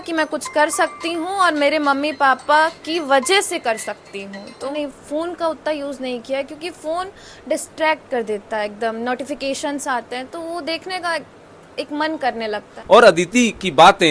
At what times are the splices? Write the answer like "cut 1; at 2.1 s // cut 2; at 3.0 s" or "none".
cut 1; at 4.7 s // cut 2; at 12.7 s